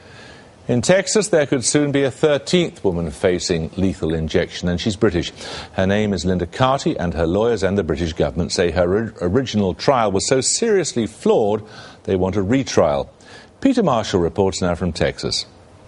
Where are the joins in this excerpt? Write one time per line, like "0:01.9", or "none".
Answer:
0:12.3